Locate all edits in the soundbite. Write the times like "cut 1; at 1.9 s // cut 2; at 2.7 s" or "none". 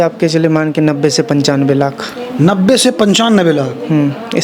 none

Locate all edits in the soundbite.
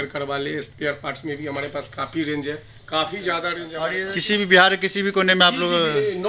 cut 1; at 3.8 s

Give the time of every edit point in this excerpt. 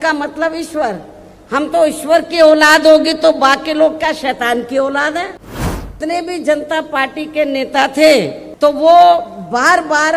cut 1; at 6.0 s // cut 2; at 8.4 s

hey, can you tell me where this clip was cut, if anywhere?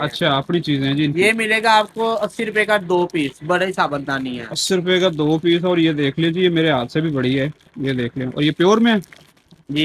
none

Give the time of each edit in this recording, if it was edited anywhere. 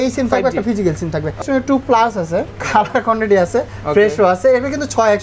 cut 1; at 1.4 s // cut 2; at 2.6 s

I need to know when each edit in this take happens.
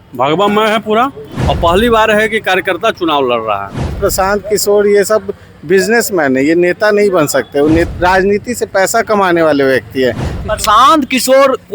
cut 1; at 1.3 s // cut 2; at 4.0 s // cut 3; at 7.9 s // cut 4; at 10.4 s

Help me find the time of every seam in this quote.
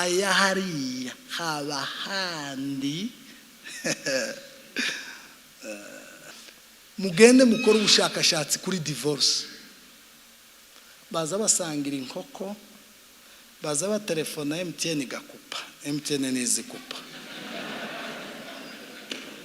cut 1; at 6.3 s

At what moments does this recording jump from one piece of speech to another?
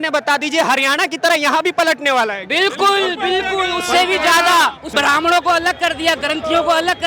cut 1; at 4.9 s

